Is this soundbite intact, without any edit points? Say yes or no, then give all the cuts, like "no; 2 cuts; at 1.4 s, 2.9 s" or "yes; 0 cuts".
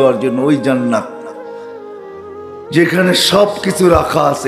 no; 2 cuts; at 1.1 s, 2.7 s